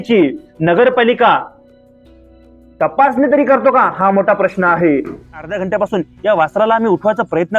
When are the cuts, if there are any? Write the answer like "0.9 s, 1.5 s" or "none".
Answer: 5.5 s